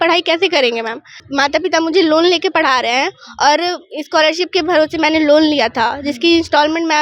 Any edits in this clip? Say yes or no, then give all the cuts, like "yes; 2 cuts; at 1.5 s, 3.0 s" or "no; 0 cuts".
yes; 1 cut; at 1.2 s